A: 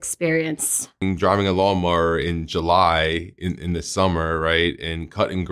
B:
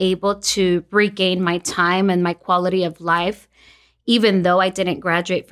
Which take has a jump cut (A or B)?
A